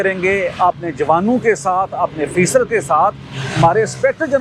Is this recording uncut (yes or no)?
yes